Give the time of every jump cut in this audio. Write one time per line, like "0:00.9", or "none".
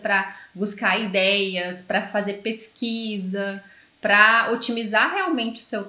none